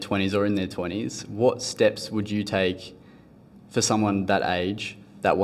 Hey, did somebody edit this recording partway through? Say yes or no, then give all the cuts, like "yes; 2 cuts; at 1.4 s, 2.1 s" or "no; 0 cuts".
no; 0 cuts